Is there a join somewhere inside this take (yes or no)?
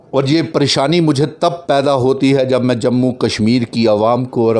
no